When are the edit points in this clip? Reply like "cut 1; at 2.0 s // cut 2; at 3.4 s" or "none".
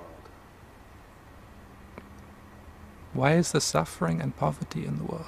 none

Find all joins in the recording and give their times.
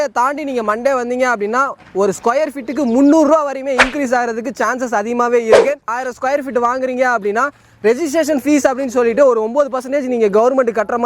cut 1; at 6.0 s

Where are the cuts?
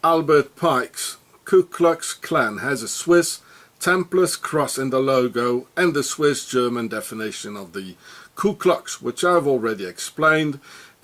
cut 1; at 4.7 s

